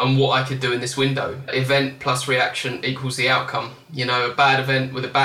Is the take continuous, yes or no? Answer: no